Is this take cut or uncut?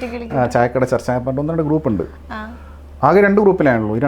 uncut